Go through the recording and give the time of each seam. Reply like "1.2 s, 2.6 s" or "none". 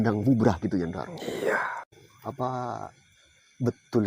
1.8 s